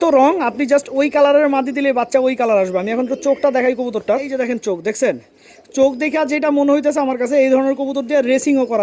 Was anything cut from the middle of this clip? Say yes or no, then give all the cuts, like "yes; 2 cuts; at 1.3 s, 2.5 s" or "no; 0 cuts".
yes; 1 cut; at 4.3 s